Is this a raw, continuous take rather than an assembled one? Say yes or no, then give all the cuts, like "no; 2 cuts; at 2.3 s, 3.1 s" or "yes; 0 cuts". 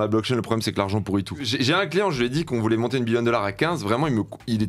no; 1 cut; at 1.5 s